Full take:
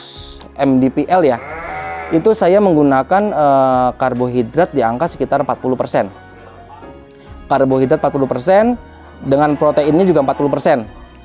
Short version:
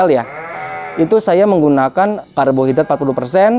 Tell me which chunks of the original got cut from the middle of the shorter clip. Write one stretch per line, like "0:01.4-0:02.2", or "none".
0:03.3-0:07.3

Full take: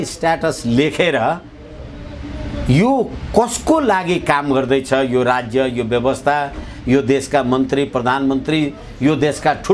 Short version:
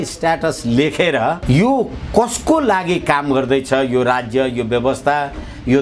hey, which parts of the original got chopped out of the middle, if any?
0:01.4-0:02.6

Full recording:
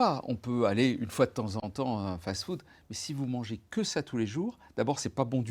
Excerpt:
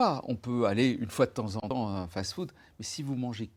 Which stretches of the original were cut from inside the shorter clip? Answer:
0:01.7-0:01.8

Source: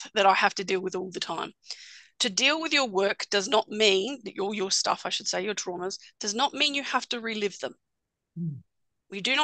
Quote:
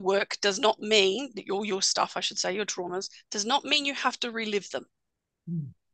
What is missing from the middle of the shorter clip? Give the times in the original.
none

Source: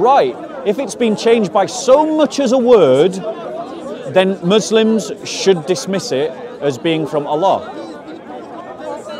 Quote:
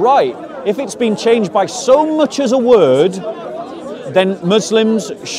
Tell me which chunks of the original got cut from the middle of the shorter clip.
none

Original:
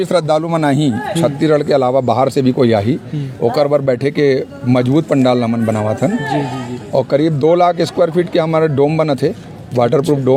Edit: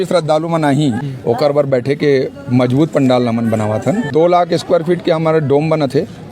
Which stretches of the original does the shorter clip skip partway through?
0:01.0-0:03.2
0:06.2-0:07.4

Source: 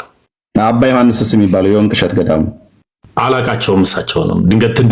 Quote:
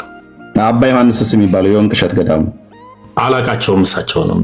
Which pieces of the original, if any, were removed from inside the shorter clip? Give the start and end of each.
none

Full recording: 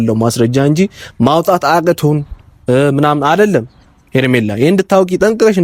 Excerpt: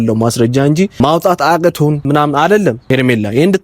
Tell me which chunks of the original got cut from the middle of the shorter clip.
0:00.9-0:01.2
0:02.3-0:02.9
0:03.7-0:04.1

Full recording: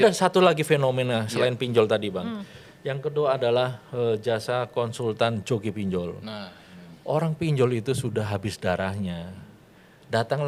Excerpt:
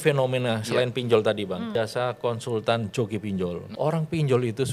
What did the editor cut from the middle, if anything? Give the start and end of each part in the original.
0:02.3-0:04.2
0:06.2-0:06.9

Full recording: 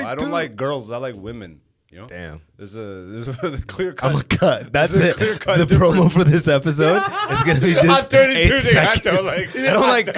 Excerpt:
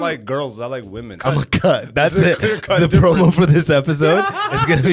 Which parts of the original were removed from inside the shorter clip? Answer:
0:01.5-0:04.0

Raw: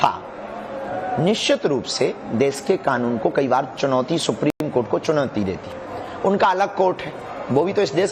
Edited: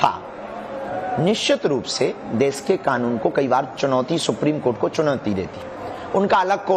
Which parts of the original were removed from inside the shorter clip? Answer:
0:04.5-0:04.7

